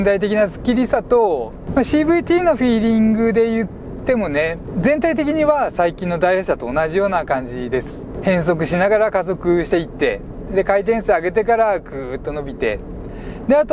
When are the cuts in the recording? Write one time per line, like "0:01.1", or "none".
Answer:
0:01.6
0:04.7
0:08.1

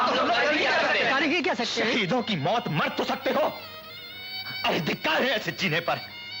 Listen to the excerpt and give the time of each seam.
none

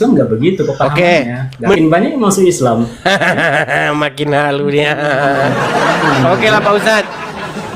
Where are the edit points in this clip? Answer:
0:01.8

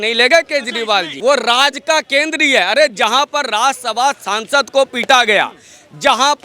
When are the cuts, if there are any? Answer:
0:01.1

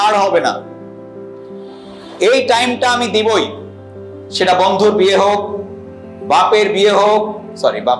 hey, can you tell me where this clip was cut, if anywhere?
none

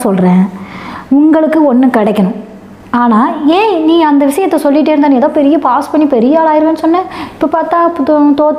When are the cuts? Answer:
none

